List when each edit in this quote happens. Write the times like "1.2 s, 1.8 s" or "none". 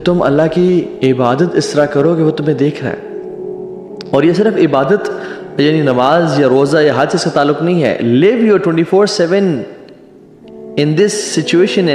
none

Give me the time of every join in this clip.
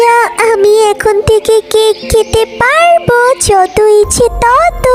none

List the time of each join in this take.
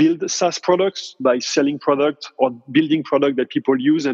none

